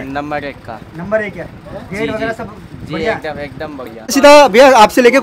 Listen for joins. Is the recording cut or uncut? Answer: cut